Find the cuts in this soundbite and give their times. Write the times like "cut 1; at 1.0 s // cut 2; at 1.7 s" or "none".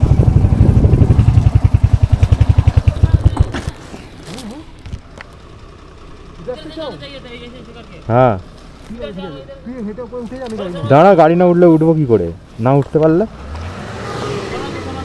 cut 1; at 3.0 s